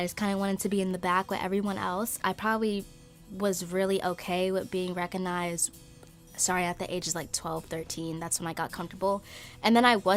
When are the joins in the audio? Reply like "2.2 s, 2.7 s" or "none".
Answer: none

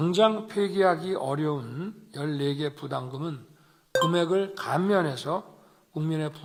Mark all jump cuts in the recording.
none

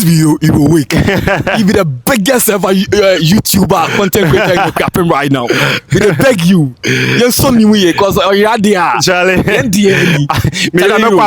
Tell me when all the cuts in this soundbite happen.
none

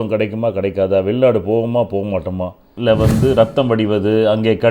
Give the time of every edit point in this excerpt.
2.6 s

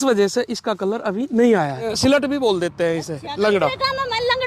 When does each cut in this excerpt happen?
1.9 s

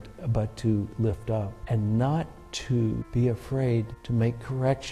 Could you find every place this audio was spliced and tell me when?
1.6 s, 3.1 s, 4.0 s

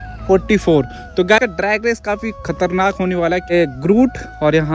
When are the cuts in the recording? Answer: 1.4 s, 3.5 s

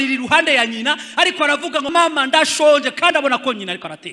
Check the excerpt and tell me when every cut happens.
1.9 s

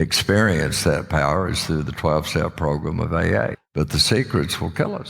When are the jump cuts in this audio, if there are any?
3.6 s

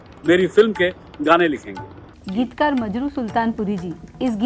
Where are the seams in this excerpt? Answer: 2.2 s

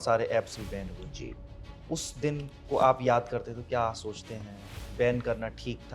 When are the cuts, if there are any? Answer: 2.5 s

